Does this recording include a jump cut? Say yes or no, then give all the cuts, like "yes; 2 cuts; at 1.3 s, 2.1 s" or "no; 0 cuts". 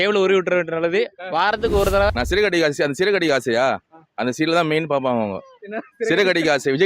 yes; 1 cut; at 2.2 s